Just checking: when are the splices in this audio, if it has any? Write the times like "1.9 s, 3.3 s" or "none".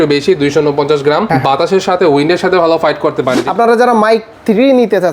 3.4 s